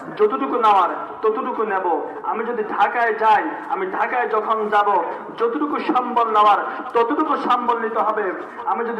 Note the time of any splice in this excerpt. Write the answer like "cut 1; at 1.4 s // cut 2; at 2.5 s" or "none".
none